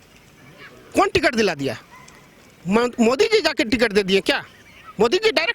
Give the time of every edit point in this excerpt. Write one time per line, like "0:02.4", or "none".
none